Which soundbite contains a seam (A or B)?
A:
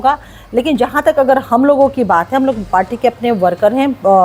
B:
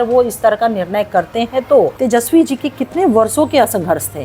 B